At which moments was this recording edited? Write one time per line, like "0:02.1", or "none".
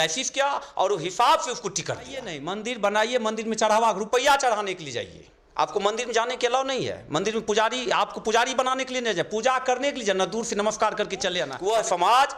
0:02.4
0:11.5